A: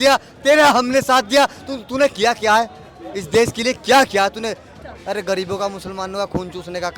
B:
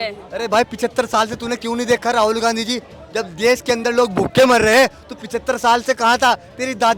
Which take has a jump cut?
A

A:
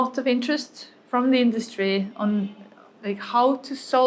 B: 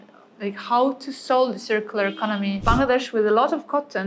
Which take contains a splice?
B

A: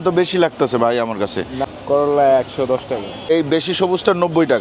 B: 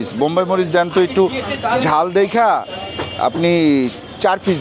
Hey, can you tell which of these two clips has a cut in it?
A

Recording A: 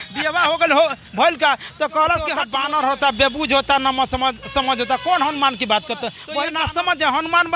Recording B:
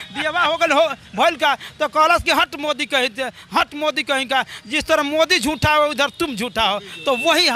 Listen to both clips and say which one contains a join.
A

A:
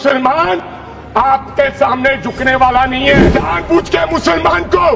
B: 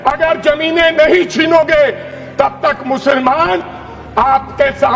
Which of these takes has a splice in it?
A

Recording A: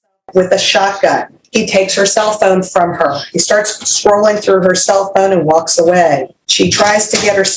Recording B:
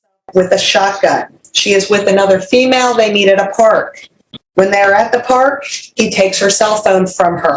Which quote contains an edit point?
A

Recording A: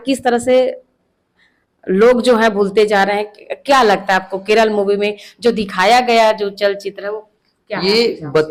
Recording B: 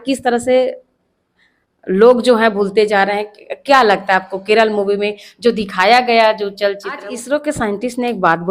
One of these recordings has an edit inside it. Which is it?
B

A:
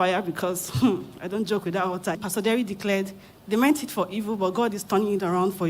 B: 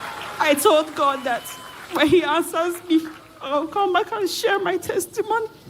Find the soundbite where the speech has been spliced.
A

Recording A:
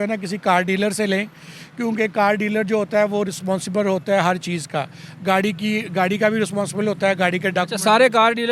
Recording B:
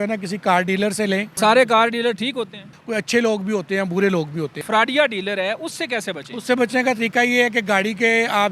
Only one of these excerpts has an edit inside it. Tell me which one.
B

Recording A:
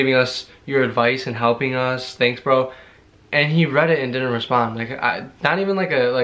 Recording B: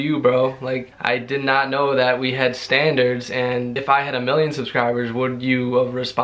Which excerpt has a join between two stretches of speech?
B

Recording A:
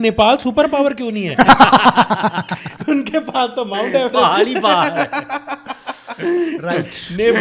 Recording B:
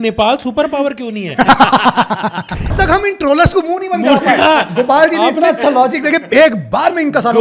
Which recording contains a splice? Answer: B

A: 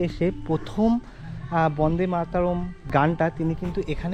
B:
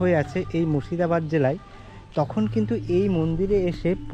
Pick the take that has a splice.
A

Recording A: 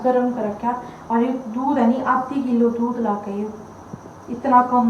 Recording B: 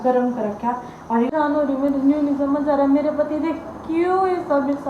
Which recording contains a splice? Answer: B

